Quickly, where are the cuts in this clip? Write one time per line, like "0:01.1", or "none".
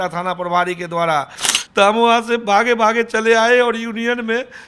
0:01.4